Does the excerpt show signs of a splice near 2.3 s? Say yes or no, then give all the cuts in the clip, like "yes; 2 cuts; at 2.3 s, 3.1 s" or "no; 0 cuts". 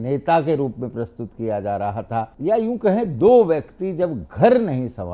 yes; 1 cut; at 2.3 s